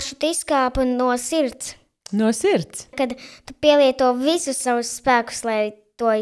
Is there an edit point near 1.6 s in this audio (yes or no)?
no